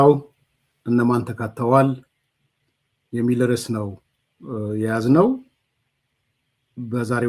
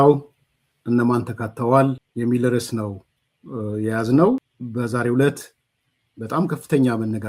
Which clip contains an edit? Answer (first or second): second